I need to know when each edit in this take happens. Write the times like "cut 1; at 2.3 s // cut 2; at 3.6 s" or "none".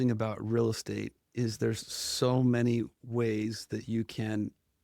none